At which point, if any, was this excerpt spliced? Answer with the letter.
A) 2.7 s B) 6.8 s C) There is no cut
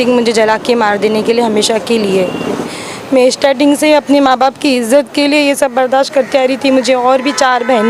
A